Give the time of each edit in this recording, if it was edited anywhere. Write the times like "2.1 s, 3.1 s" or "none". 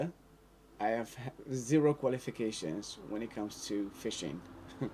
none